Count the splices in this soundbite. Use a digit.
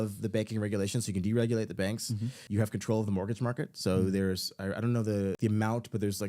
2